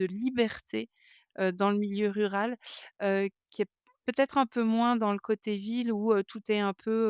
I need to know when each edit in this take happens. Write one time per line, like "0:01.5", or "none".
none